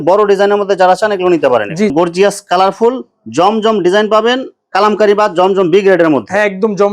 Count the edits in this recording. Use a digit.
1